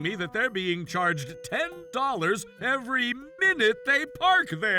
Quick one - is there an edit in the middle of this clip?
no; 0 cuts

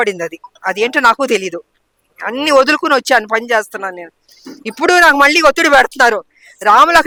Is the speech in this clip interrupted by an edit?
no; 0 cuts

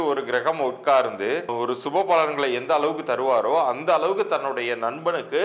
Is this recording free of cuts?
no; 1 cut; at 1.5 s

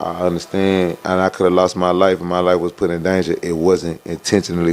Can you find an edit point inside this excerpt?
yes; 1 cut; at 1.0 s

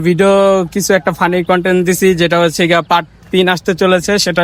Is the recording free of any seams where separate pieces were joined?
yes; 0 cuts

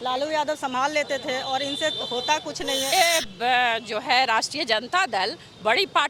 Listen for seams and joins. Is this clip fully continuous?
no; 1 cut; at 2.9 s

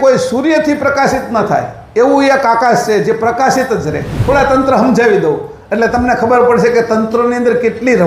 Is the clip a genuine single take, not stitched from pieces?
no; 1 cut; at 4.2 s

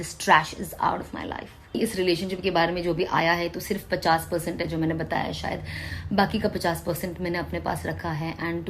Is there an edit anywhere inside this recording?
yes; 1 cut; at 1.8 s

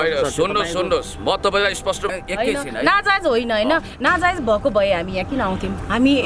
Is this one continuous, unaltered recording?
no; 1 cut; at 2.1 s

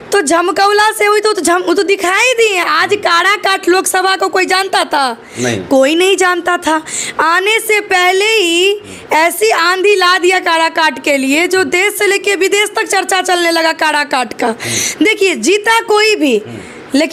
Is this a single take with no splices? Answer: yes; 0 cuts

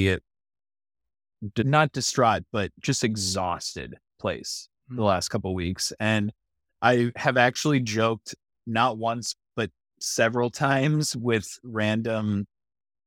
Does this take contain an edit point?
no; 0 cuts

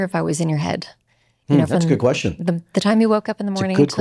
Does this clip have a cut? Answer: no; 0 cuts

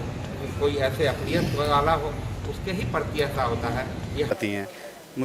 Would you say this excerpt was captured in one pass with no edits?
no; 1 cut; at 4.3 s

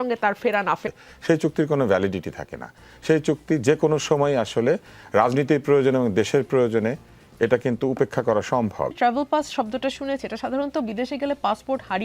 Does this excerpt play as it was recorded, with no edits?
no; 2 cuts; at 0.8 s, 8.9 s

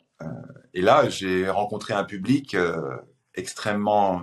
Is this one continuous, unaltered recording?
yes; 0 cuts

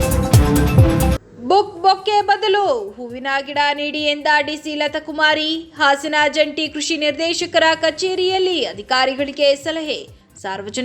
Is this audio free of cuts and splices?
no; 1 cut; at 1.1 s

